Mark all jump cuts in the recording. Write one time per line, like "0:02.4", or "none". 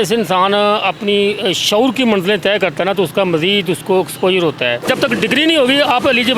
0:04.8

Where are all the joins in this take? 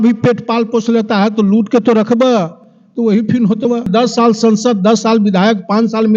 0:03.9

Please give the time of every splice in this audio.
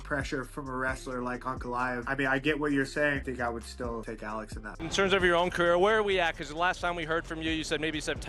0:04.6

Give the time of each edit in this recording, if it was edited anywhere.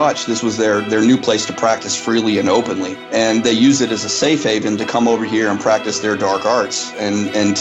0:02.9

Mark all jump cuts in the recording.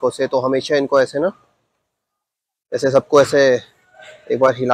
none

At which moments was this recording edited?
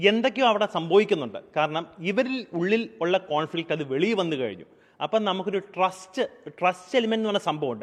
none

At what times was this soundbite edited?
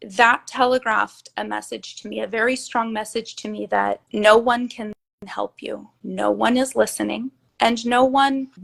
none

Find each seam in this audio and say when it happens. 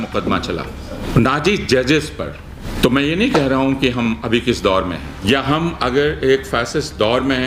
0:01.0
0:02.6
0:05.1

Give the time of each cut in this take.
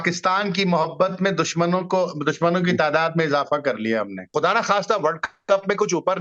0:04.2

